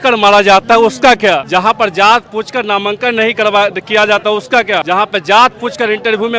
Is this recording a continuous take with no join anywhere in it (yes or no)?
no